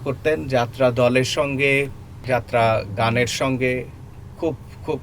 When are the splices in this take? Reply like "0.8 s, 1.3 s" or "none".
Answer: 2.1 s